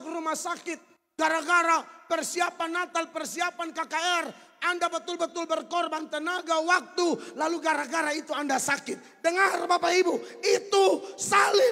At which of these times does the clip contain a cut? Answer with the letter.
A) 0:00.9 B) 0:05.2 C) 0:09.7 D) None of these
A